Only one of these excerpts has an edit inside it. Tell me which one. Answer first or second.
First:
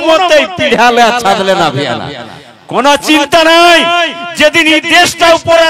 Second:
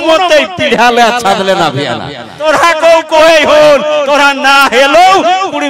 second